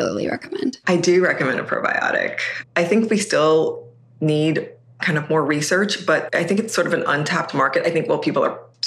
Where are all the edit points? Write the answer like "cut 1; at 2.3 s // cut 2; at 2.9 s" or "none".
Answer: cut 1; at 0.8 s // cut 2; at 2.7 s